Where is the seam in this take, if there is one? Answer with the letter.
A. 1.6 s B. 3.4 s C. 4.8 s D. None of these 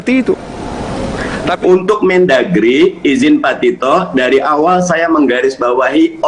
A